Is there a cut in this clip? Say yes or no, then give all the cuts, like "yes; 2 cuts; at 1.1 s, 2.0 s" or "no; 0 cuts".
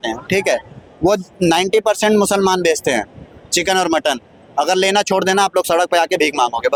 no; 0 cuts